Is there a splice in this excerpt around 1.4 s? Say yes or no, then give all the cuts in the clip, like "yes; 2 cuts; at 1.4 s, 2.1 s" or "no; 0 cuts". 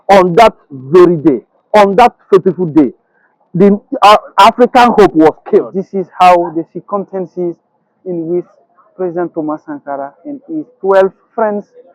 no; 1 cut; at 5.8 s